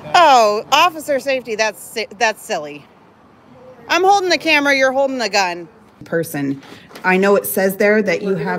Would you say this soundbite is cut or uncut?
cut